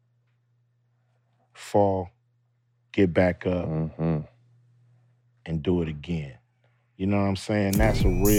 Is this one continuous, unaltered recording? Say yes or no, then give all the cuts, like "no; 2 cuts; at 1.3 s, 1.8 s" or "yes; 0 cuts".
yes; 0 cuts